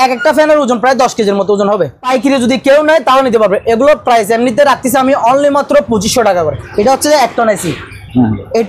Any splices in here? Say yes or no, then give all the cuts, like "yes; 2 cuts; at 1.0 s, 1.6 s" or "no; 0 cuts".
yes; 2 cuts; at 2.0 s, 6.6 s